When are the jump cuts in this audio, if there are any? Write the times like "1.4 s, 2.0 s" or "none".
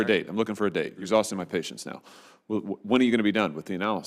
1.0 s